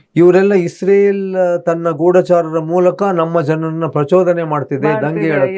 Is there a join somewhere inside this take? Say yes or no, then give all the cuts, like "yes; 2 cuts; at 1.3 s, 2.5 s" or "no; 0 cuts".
no; 0 cuts